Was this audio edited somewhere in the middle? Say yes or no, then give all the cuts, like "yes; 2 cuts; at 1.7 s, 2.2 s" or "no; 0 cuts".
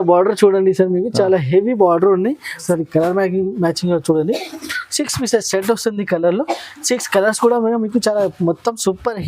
yes; 1 cut; at 2.5 s